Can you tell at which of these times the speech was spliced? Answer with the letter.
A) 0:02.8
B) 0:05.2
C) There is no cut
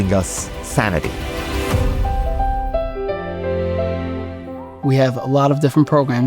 A